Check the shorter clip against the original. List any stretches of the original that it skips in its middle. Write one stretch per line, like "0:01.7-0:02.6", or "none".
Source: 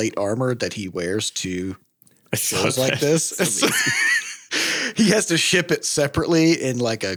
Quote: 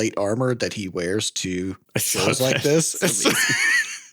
0:01.8-0:02.2